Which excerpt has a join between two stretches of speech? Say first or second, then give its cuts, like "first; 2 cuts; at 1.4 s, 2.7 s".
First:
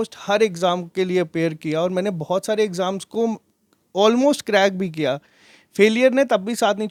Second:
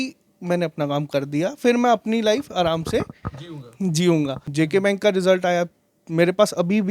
second; 1 cut; at 4.4 s